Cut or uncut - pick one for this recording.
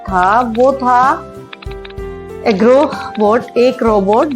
uncut